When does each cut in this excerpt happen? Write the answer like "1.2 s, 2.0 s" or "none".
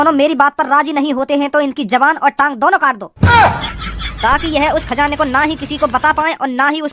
3.1 s